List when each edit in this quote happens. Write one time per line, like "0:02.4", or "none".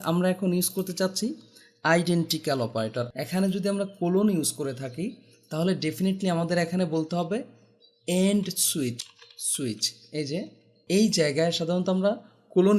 0:03.1
0:09.0
0:10.8